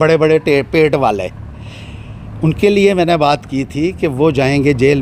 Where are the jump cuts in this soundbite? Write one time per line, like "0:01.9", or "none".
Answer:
none